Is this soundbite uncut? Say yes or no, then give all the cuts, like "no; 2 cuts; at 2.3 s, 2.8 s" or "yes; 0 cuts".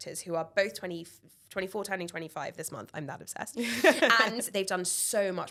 yes; 0 cuts